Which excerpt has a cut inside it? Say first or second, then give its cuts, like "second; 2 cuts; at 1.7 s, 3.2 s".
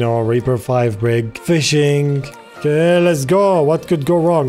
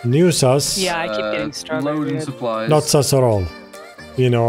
first; 2 cuts; at 1.3 s, 2.5 s